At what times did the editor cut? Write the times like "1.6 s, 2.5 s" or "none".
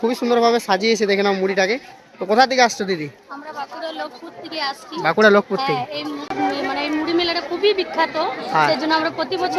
6.3 s